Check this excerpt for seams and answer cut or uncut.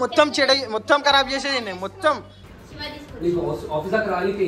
cut